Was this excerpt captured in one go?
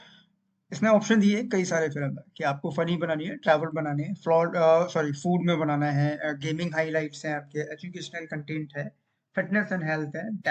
yes; 0 cuts

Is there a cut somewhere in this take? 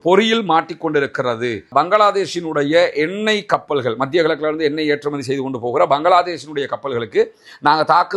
yes; 1 cut; at 1.6 s

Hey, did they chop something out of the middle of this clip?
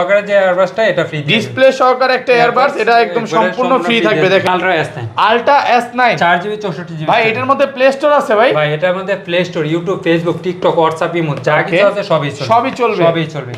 yes; 1 cut; at 4.5 s

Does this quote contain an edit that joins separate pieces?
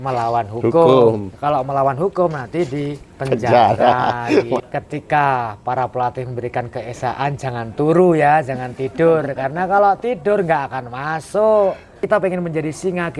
yes; 2 cuts; at 4.7 s, 11.9 s

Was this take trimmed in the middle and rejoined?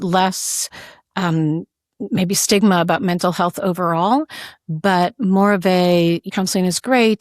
yes; 1 cut; at 6.3 s

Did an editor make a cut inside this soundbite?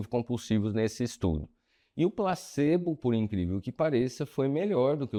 no; 0 cuts

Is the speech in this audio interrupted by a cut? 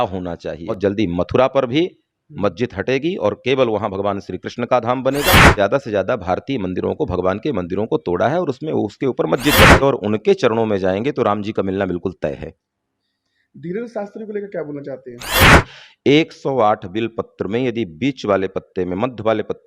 yes; 4 cuts; at 0.8 s, 5.5 s, 9.8 s, 15.4 s

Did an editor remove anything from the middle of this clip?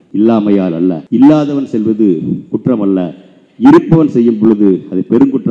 yes; 1 cut; at 1.0 s

